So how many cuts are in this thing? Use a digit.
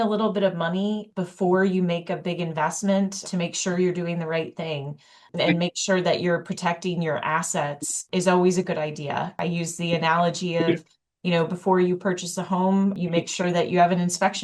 4